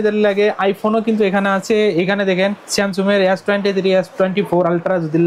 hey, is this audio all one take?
yes; 0 cuts

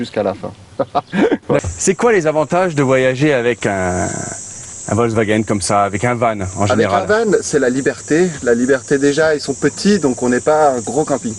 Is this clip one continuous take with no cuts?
yes; 0 cuts

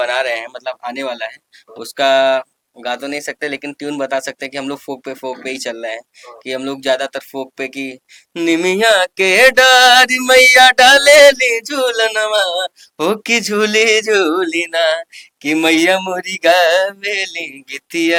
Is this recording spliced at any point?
no; 0 cuts

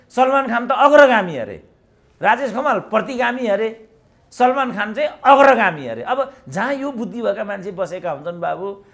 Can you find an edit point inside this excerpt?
no; 0 cuts

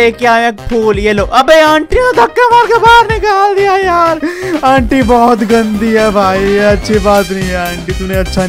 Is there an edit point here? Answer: no; 0 cuts

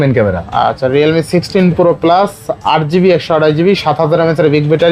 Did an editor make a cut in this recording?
no; 0 cuts

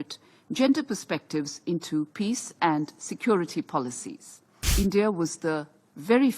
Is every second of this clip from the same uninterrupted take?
no; 1 cut; at 4.6 s

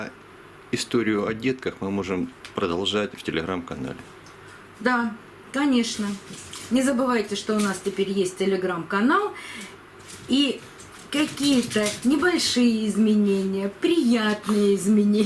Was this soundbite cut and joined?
no; 0 cuts

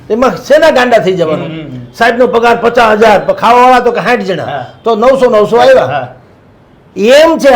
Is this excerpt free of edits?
yes; 0 cuts

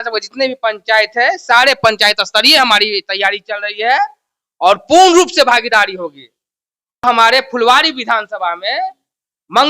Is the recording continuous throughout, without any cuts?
no; 1 cut; at 7.0 s

